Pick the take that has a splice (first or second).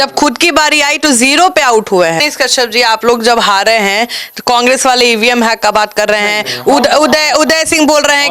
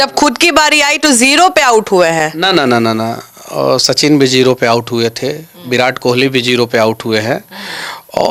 first